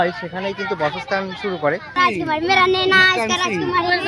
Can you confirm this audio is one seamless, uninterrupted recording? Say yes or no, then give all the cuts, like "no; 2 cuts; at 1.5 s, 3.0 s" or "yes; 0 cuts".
no; 1 cut; at 2.0 s